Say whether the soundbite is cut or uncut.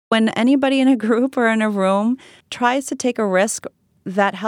uncut